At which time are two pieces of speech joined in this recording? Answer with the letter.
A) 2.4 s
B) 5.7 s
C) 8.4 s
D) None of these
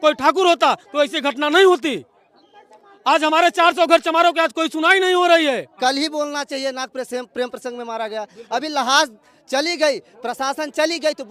B